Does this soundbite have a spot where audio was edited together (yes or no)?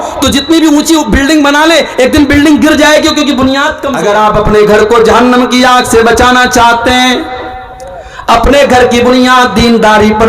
yes